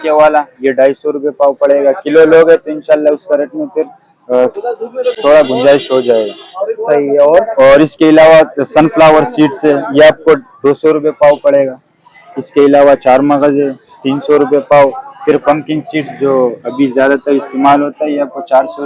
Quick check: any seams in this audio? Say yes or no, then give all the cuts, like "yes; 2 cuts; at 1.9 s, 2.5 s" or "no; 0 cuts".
no; 0 cuts